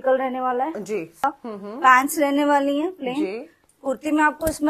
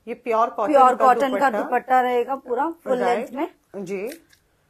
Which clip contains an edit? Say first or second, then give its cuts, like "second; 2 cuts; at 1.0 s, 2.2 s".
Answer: first; 1 cut; at 1.2 s